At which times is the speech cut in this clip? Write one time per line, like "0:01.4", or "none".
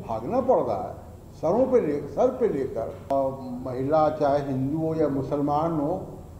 0:03.1